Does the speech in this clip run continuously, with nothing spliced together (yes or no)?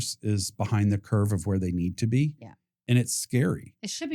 yes